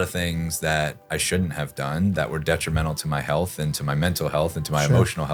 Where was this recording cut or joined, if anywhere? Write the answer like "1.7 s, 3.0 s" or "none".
none

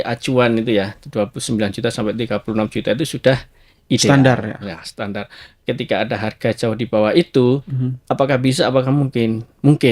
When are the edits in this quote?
none

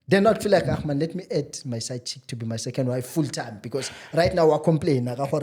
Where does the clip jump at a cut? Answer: none

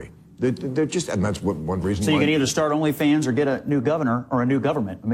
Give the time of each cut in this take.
none

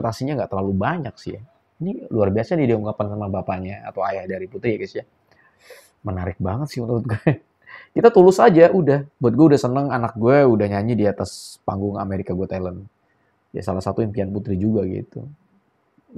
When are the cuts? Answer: none

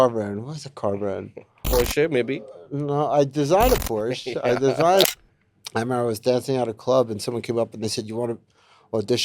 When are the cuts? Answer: 5.1 s

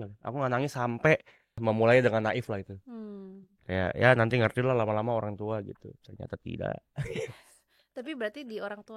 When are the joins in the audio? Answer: 1.6 s

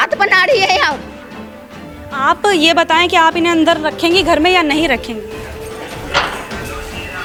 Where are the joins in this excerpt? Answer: none

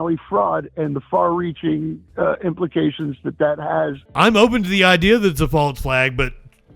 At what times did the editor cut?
4.0 s

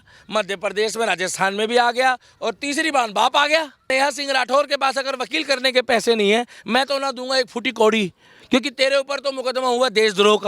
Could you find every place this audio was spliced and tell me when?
3.9 s

